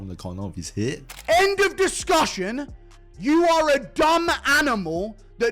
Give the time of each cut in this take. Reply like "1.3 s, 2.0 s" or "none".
1.1 s